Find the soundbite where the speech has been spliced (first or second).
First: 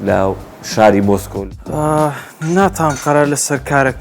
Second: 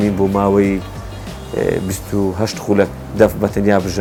first